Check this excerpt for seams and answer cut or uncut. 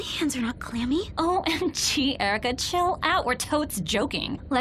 uncut